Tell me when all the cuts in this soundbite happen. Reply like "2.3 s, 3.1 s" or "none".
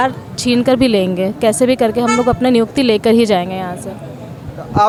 none